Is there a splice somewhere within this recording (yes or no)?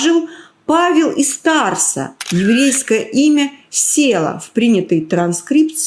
no